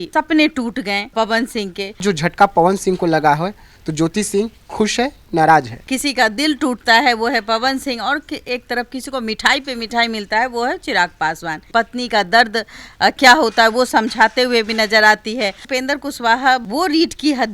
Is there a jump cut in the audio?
yes; 4 cuts; at 2.0 s, 5.9 s, 11.7 s, 15.6 s

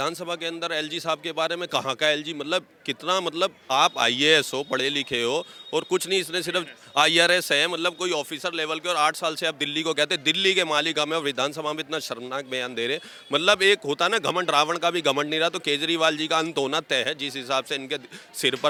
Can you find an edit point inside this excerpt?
no; 0 cuts

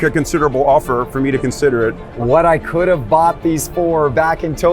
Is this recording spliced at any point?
yes; 1 cut; at 2.1 s

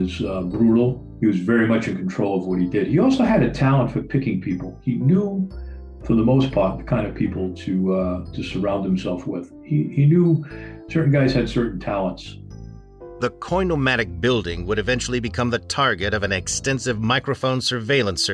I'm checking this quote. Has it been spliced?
no; 0 cuts

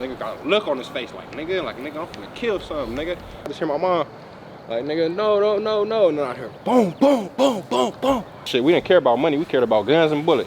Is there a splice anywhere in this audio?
yes; 2 cuts; at 3.5 s, 8.4 s

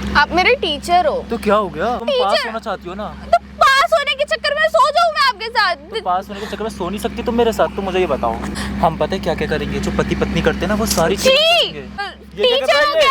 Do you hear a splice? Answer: yes; 3 cuts; at 2.0 s, 8.5 s, 12.0 s

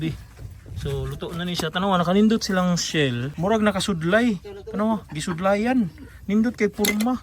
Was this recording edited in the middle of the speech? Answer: yes; 1 cut; at 3.3 s

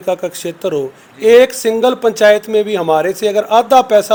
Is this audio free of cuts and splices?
yes; 0 cuts

